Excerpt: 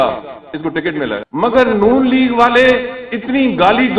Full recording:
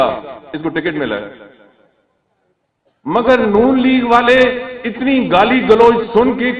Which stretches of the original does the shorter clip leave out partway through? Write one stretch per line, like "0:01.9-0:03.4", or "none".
0:01.3-0:03.0